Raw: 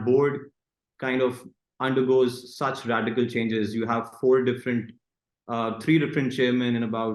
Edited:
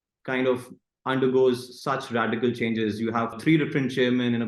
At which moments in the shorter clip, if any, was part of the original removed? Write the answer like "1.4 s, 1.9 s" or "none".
3.4 s